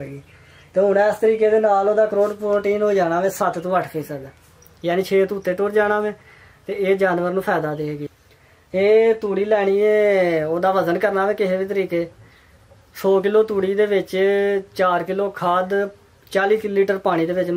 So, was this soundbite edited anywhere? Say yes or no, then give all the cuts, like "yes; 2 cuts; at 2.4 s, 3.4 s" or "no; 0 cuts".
yes; 1 cut; at 8.1 s